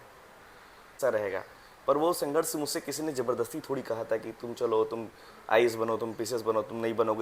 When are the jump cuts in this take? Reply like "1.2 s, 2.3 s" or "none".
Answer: 0.9 s